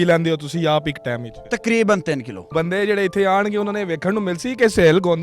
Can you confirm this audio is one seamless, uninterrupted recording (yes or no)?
no